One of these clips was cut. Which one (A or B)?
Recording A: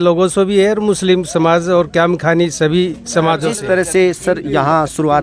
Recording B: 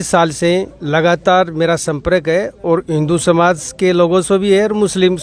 A